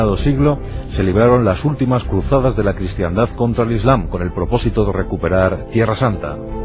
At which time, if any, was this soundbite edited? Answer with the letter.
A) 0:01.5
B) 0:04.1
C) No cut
B